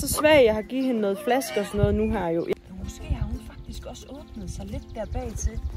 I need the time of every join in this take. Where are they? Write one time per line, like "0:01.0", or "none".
0:02.5